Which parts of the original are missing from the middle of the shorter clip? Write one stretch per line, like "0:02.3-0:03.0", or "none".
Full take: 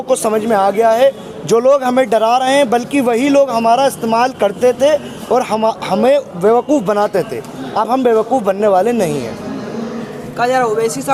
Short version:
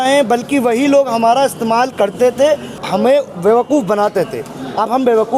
0:05.2-0:05.8